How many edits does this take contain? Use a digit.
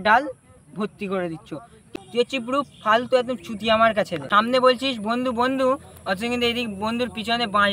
2